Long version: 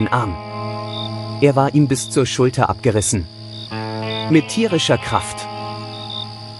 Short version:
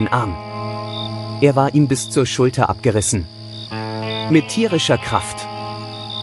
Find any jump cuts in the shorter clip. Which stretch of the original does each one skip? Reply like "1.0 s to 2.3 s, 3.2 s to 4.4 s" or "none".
none